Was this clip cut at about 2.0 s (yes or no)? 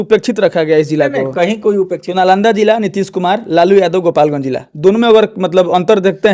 yes